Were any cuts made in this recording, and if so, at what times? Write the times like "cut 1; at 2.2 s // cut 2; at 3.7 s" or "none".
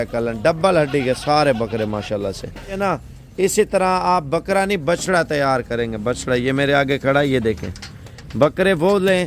cut 1; at 2.8 s